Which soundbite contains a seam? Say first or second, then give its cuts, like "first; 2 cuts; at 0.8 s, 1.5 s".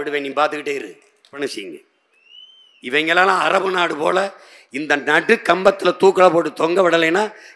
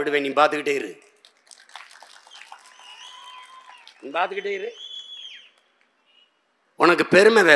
first; 1 cut; at 1.3 s